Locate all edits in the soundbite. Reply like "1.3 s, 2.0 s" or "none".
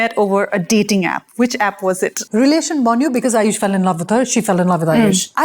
2.2 s